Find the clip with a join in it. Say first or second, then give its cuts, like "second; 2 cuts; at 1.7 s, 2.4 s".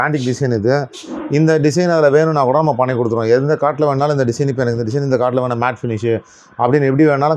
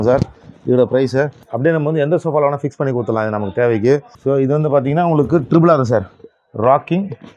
second; 2 cuts; at 1.4 s, 4.1 s